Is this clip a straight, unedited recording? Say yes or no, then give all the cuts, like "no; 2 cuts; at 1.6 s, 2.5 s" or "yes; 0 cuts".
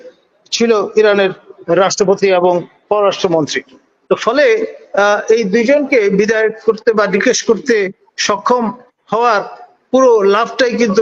yes; 0 cuts